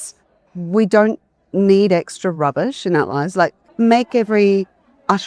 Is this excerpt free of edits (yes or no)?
no